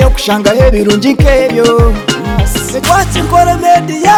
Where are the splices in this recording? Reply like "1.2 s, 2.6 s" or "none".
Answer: none